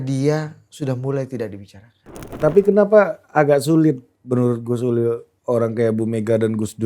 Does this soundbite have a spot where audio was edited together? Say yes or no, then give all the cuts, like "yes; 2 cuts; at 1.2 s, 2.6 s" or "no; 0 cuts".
yes; 1 cut; at 2.3 s